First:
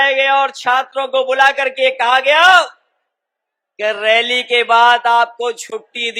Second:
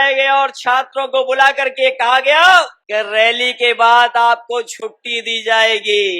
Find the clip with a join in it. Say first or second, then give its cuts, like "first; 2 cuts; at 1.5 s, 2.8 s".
second; 1 cut; at 2.8 s